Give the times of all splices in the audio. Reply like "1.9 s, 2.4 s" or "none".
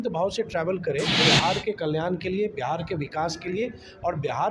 1.2 s